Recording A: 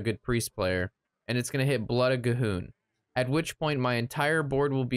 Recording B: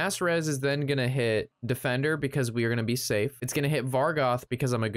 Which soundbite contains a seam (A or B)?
B